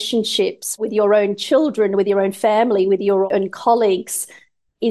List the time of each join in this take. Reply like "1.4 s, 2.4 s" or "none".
3.3 s